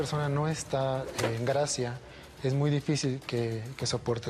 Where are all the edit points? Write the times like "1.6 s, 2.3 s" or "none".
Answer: none

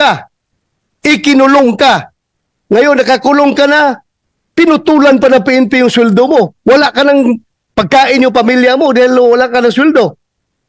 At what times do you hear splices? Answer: none

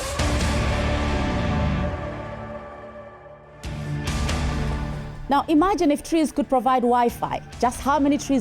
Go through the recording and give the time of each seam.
3.4 s

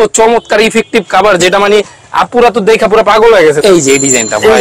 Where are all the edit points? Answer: 3.6 s

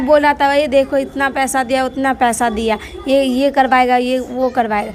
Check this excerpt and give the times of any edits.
none

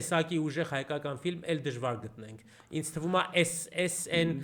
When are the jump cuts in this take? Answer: none

